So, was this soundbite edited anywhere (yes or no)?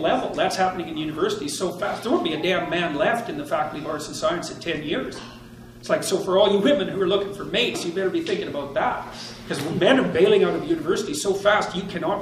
no